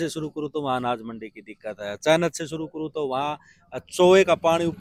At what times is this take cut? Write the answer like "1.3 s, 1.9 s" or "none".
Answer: none

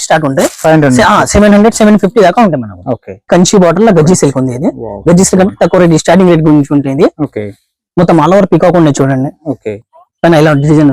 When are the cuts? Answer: 3.2 s

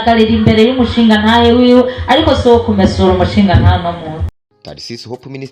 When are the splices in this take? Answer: 4.3 s

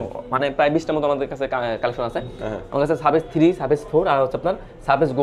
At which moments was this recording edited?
none

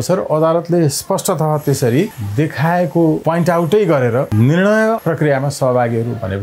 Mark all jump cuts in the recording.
2.2 s, 3.2 s, 4.3 s, 5.0 s

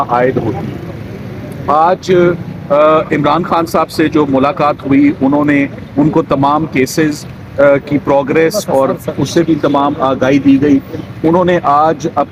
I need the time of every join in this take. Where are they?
none

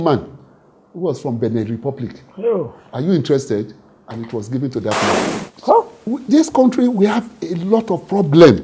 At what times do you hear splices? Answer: 5.3 s

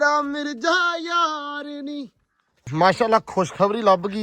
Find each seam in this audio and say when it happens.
2.7 s

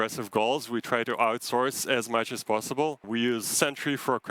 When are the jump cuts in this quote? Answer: 3.1 s

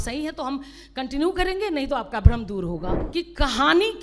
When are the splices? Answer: 3.0 s

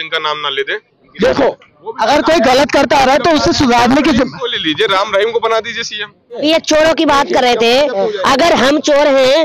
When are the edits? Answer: 1.0 s, 6.4 s

